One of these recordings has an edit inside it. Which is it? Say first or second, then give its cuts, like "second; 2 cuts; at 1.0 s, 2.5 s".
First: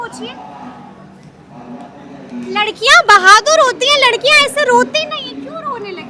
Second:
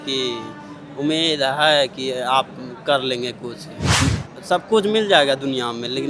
second; 1 cut; at 3.9 s